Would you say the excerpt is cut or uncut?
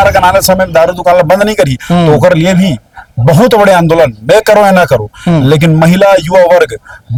uncut